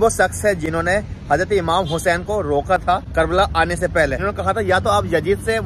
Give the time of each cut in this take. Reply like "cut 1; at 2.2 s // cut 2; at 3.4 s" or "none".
cut 1; at 3.1 s // cut 2; at 4.2 s

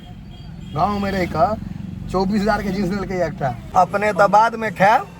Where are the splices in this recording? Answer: cut 1; at 3.6 s

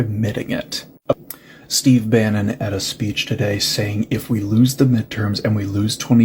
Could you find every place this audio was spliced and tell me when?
cut 1; at 1.2 s

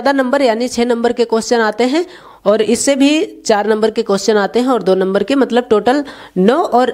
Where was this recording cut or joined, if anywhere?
none

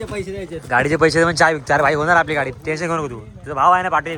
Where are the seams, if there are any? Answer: none

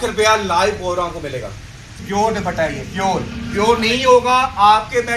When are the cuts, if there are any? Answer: cut 1; at 1.9 s

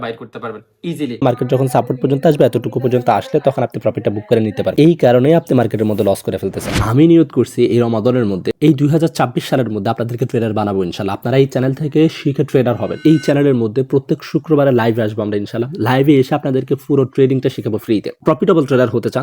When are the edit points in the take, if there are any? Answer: cut 1; at 1.2 s

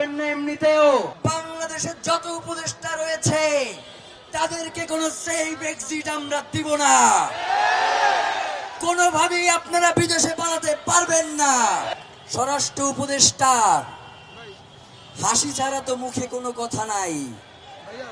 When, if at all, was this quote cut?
cut 1; at 1.1 s // cut 2; at 11.9 s

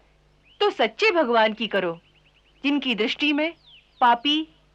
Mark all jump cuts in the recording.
none

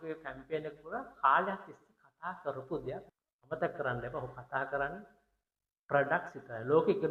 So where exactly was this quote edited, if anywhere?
cut 1; at 3.1 s

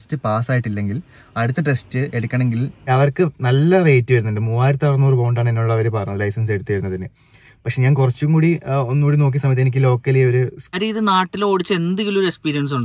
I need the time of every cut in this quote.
cut 1; at 2.9 s // cut 2; at 10.8 s

